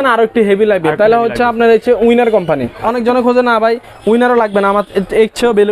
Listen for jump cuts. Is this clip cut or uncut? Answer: cut